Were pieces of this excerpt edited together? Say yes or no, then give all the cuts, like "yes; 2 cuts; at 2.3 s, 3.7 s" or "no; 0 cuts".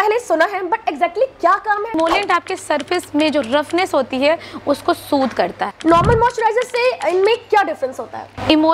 yes; 2 cuts; at 2.0 s, 5.7 s